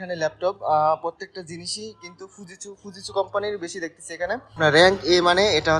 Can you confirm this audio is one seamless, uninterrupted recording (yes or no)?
no